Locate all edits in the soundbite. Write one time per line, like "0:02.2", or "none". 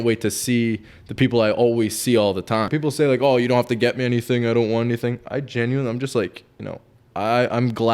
0:02.7